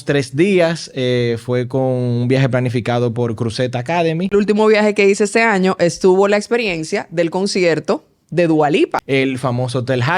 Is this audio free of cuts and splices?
no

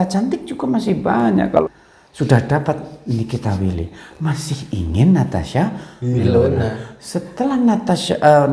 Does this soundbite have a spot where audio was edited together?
yes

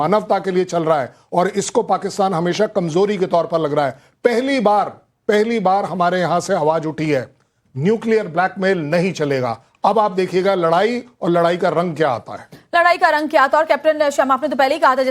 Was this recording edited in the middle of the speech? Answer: yes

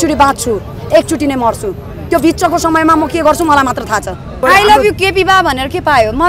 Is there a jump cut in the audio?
yes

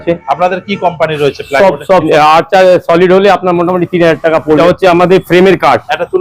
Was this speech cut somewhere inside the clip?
yes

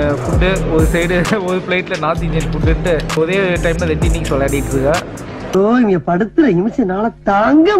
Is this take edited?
yes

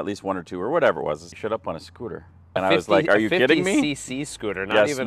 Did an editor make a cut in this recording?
yes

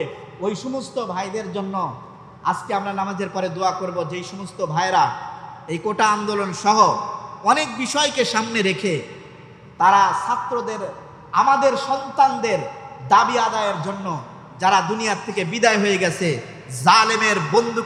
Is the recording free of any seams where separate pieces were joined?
yes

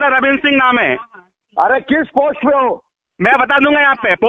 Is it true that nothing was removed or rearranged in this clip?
yes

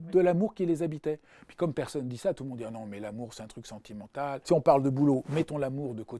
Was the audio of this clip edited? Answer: yes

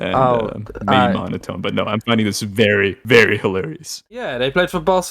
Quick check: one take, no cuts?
no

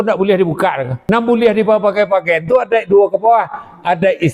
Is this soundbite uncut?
no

